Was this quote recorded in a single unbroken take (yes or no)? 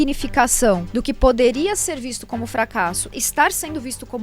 no